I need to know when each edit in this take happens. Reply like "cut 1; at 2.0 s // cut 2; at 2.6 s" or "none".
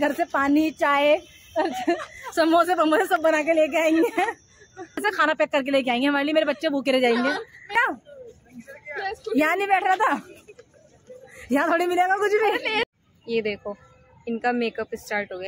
cut 1; at 5.0 s // cut 2; at 7.8 s // cut 3; at 13.0 s